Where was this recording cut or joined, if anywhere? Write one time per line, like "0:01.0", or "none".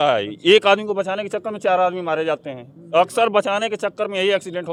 none